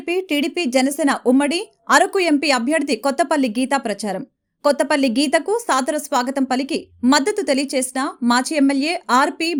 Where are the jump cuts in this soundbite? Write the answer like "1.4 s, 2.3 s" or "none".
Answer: none